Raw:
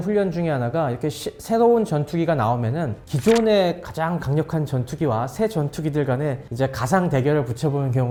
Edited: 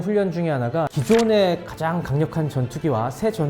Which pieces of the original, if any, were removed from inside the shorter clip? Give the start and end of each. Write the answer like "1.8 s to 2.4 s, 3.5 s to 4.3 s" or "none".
0.9 s to 3.1 s